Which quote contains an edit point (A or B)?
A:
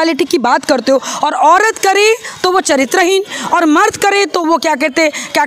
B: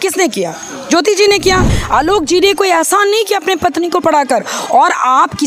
B